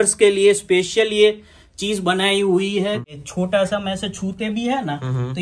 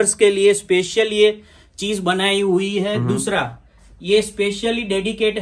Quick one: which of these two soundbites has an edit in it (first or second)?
first